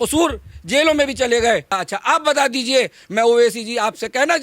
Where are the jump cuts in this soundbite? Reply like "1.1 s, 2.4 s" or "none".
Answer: 1.7 s